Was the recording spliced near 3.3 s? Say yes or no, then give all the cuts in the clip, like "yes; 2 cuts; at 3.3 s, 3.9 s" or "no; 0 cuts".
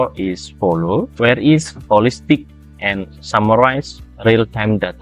no; 1 cut; at 1.1 s